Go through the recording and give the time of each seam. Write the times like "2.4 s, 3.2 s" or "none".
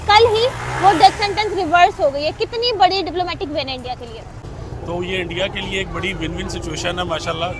4.4 s